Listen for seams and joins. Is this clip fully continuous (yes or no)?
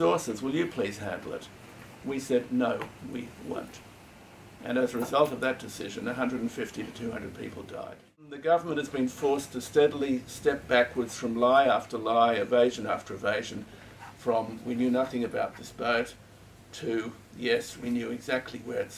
no